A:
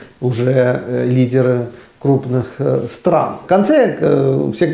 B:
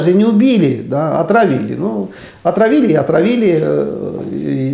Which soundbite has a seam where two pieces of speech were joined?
A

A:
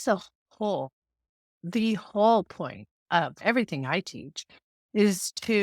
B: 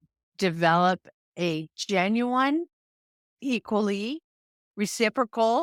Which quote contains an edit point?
A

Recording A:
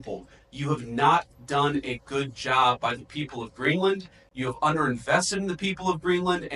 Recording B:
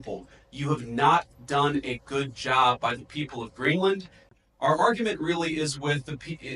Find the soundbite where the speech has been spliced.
B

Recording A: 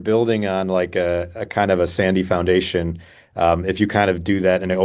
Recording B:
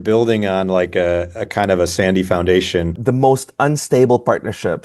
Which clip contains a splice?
B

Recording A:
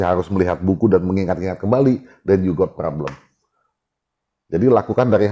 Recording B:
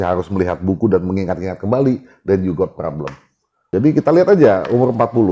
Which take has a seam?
B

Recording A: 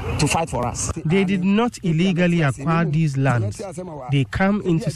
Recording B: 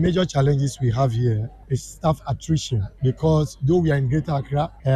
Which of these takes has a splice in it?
A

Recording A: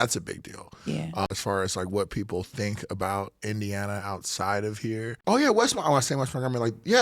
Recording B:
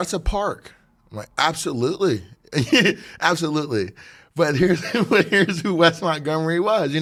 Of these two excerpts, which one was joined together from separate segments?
A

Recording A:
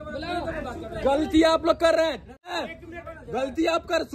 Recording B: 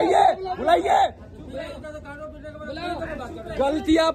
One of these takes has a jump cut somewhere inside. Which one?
A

